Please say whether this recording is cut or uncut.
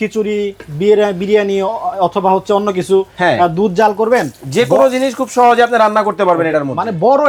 uncut